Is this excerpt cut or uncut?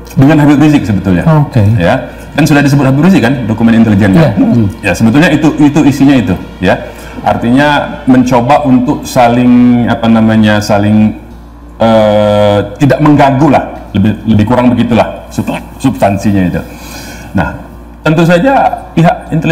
uncut